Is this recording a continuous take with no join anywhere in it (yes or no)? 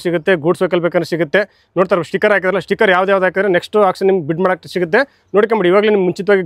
yes